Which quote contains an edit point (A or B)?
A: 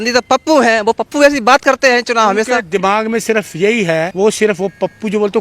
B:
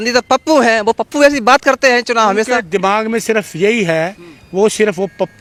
A